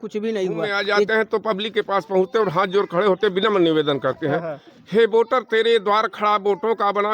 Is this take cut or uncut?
cut